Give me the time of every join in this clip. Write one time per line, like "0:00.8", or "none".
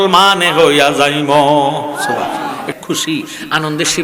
0:02.6